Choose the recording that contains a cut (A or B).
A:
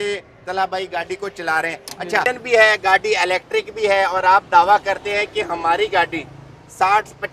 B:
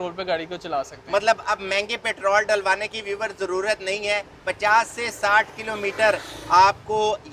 A